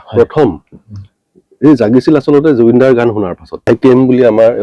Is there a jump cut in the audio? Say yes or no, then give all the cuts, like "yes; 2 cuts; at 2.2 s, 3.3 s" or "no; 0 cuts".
yes; 1 cut; at 3.7 s